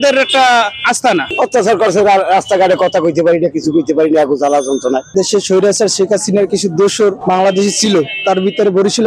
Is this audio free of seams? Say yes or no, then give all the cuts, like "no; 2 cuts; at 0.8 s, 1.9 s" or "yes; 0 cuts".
no; 2 cuts; at 1.3 s, 5.0 s